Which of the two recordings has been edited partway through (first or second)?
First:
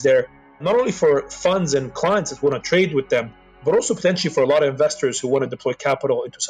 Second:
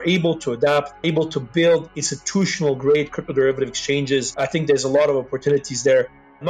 second